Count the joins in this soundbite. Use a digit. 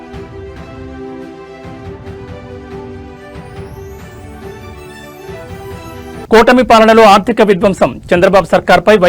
1